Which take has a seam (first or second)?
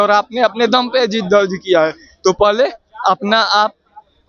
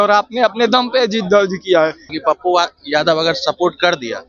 second